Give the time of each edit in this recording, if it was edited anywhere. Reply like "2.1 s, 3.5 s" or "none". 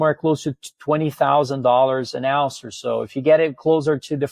none

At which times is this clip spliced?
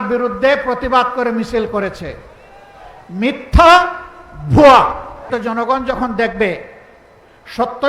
5.3 s

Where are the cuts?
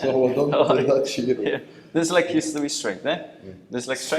none

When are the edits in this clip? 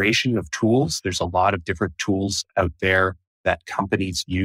none

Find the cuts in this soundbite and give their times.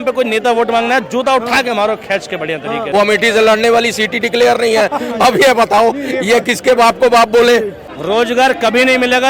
2.9 s, 7.9 s

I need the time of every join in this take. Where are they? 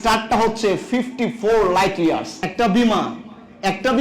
2.3 s

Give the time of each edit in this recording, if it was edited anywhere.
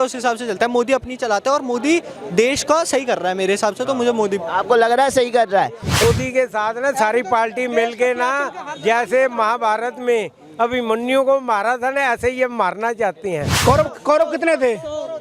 6.0 s, 13.5 s

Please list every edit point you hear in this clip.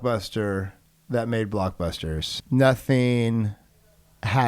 2.3 s

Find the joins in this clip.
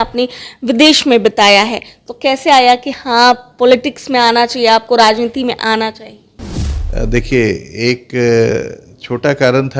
none

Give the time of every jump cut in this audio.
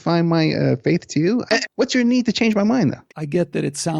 1.5 s, 3.1 s

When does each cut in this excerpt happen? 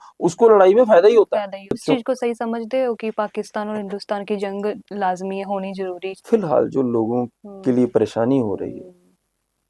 1.8 s, 6.1 s

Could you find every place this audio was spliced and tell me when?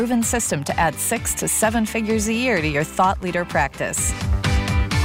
4.1 s

